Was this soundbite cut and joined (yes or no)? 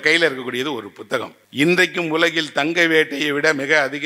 yes